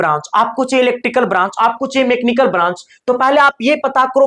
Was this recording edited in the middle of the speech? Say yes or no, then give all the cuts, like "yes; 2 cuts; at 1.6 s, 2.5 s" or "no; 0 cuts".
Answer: no; 0 cuts